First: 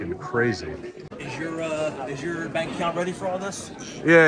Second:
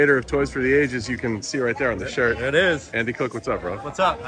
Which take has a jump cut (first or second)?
first